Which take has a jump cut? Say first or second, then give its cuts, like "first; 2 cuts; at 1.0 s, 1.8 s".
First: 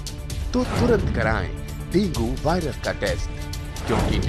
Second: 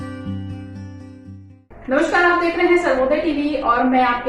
second; 1 cut; at 1.7 s